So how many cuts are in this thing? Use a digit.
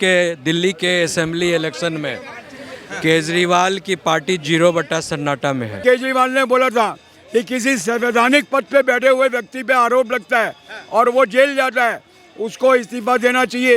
1